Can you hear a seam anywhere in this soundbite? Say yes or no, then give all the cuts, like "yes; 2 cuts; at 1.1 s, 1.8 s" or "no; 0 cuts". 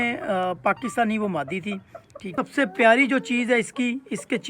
yes; 1 cut; at 2.3 s